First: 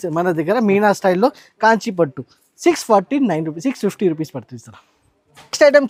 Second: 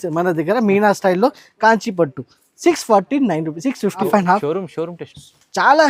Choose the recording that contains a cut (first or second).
second